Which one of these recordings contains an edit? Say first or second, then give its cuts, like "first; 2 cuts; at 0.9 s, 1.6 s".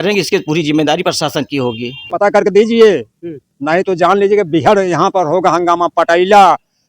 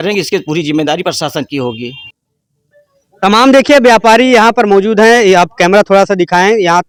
first; 1 cut; at 2.1 s